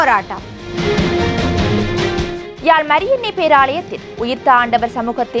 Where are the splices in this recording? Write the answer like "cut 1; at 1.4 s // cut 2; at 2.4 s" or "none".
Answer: none